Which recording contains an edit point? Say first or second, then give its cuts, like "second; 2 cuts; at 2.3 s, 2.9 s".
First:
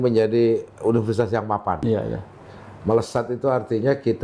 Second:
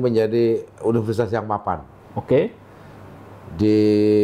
first; 1 cut; at 1.8 s